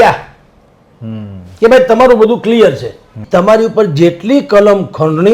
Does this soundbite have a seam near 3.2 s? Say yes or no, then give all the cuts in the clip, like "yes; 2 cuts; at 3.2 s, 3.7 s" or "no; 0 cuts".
yes; 1 cut; at 3.2 s